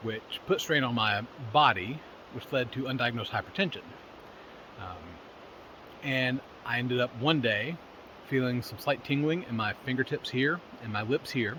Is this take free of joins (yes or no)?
yes